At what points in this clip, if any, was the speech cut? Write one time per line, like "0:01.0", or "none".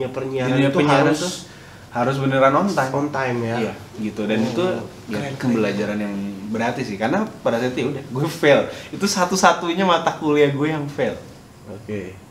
none